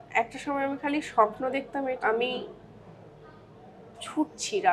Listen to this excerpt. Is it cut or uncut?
cut